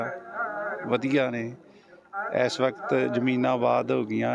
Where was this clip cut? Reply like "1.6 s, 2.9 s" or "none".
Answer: none